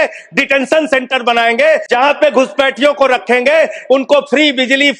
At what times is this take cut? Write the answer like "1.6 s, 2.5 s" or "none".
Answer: 1.8 s